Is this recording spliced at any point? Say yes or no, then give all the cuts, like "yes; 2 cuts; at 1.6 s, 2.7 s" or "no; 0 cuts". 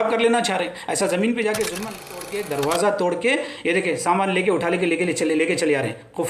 yes; 1 cut; at 2.2 s